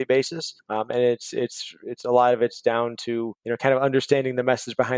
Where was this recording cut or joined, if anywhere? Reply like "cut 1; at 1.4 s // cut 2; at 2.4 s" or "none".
cut 1; at 3.4 s